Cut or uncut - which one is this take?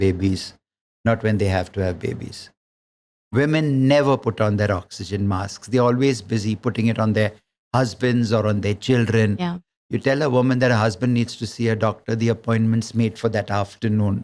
cut